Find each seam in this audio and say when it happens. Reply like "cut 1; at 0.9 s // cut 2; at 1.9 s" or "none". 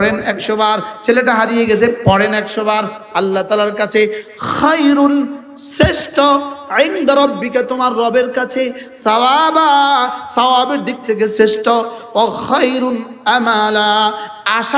cut 1; at 3.0 s